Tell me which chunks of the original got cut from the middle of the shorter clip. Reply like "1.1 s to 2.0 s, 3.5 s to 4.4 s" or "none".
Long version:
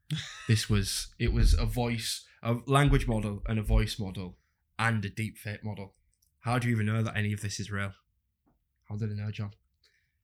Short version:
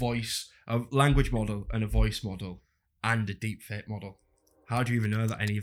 none